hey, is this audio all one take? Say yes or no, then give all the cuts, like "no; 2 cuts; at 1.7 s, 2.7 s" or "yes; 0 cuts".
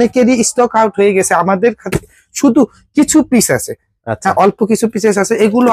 yes; 0 cuts